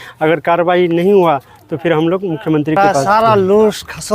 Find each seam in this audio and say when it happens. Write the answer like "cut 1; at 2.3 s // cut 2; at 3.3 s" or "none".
cut 1; at 2.8 s